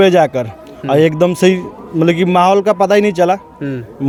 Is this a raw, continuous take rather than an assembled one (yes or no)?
yes